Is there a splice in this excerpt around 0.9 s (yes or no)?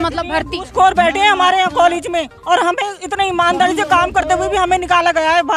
no